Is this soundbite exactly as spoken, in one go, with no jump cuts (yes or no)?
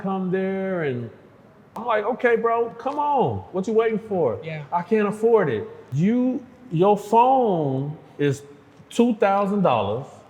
no